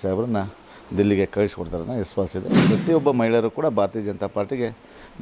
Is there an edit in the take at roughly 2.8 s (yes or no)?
yes